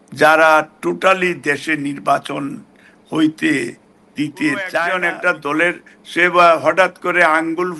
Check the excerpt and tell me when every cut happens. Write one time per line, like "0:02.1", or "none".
0:04.9